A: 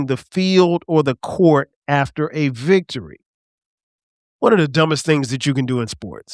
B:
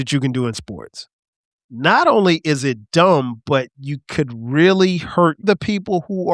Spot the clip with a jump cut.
B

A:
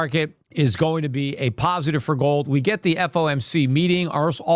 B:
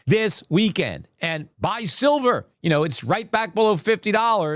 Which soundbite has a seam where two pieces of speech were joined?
B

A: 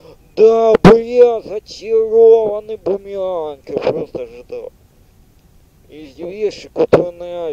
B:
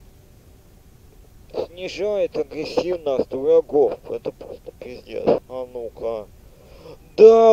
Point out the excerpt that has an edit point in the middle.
B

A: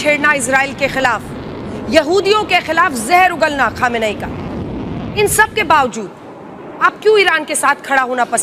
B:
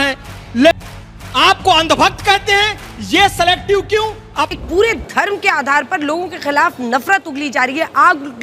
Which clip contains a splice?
B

